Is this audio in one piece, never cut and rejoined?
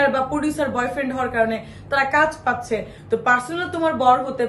no; 1 cut; at 2.9 s

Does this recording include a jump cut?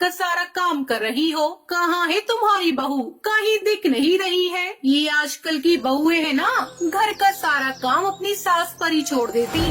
no; 0 cuts

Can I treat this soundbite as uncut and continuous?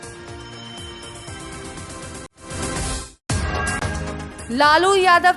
no; 2 cuts; at 2.3 s, 4.2 s

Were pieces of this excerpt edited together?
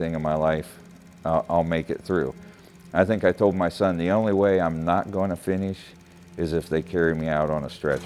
no; 0 cuts

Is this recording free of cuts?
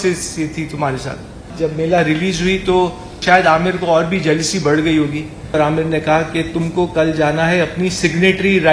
no; 3 cuts; at 1.5 s, 3.1 s, 5.5 s

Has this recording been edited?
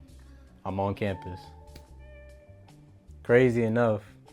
no; 0 cuts

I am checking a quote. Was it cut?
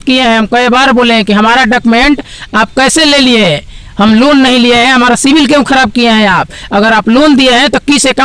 no; 0 cuts

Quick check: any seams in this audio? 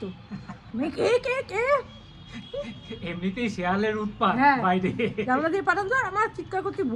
no; 0 cuts

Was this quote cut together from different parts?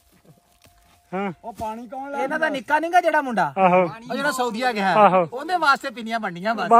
no; 0 cuts

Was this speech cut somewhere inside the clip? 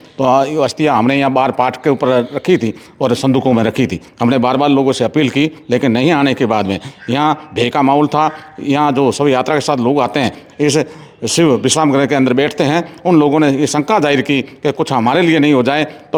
no; 0 cuts

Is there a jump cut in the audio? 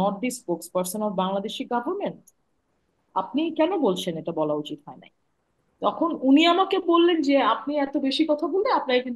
no; 0 cuts

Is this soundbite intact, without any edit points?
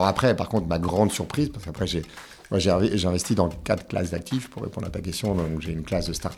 yes; 0 cuts

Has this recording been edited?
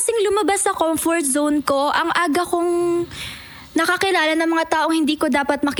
no; 0 cuts

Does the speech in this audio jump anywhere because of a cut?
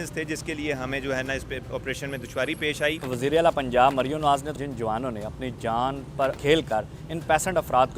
yes; 3 cuts; at 3.0 s, 4.6 s, 6.4 s

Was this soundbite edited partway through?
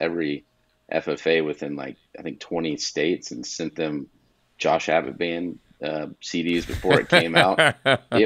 no; 0 cuts

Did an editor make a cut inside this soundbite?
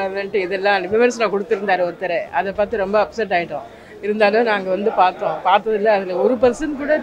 no; 0 cuts

